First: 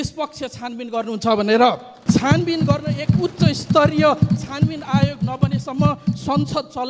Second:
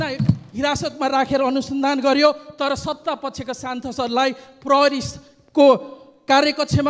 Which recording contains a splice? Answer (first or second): first